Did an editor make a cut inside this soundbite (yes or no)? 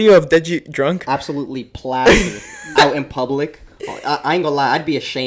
no